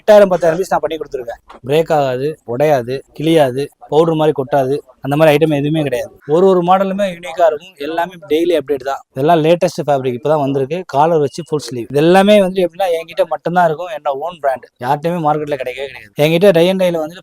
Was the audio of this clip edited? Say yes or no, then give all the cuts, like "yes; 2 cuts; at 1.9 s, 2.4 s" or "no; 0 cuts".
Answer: yes; 5 cuts; at 1.5 s, 6.1 s, 9.0 s, 11.8 s, 16.1 s